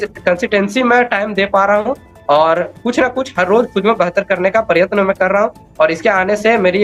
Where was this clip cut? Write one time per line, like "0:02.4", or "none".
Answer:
none